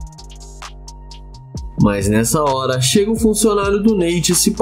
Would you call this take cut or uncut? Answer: cut